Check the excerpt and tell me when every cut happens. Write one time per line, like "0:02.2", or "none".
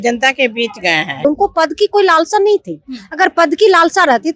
0:01.2